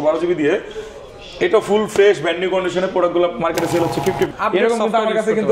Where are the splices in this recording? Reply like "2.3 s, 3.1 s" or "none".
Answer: 4.3 s